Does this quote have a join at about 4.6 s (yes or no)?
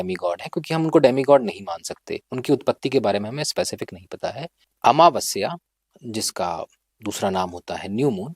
yes